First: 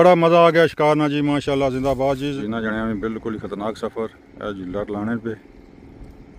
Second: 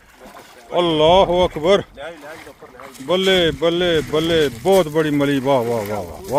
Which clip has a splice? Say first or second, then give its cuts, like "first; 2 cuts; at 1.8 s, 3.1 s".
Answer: first; 1 cut; at 2.4 s